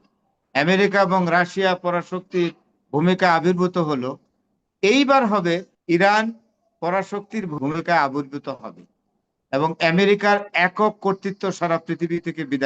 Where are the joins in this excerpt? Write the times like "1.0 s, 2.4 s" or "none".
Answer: 5.7 s, 7.5 s